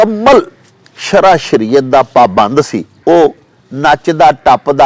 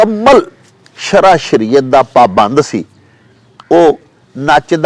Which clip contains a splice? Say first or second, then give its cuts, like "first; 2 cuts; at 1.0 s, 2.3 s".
first; 1 cut; at 2.9 s